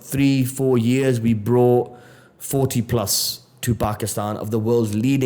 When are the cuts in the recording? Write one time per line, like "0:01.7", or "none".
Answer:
none